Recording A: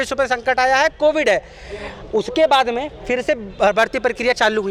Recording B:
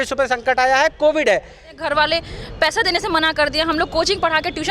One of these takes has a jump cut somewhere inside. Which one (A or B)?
B